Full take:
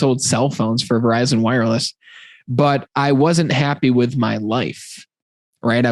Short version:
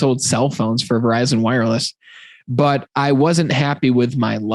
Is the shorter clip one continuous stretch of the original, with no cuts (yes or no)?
yes